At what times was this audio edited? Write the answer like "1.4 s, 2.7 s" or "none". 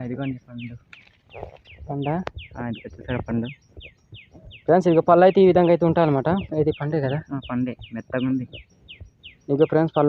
none

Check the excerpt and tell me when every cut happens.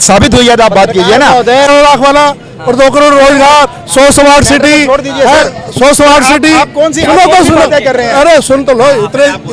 1.7 s

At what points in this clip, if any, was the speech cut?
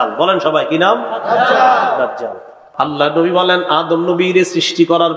2.6 s

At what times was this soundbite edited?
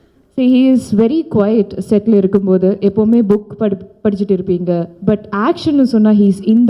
none

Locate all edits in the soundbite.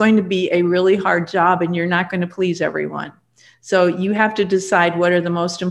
none

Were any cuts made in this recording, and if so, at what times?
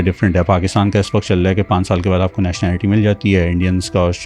none

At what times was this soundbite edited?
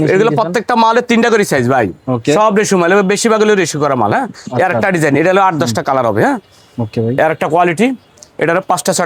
none

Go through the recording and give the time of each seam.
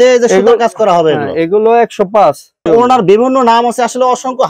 2.7 s

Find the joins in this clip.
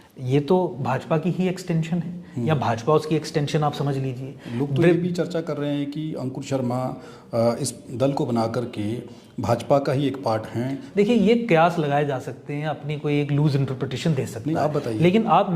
10.8 s

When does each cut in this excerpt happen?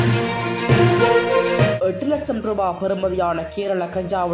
none

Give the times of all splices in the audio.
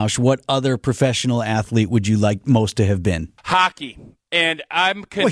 3.4 s

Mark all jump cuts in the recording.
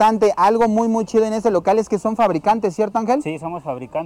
none

